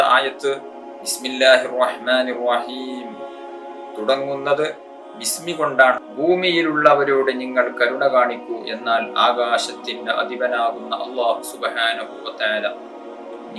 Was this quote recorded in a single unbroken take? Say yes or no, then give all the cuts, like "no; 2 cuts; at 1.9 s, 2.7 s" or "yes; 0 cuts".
no; 1 cut; at 6.0 s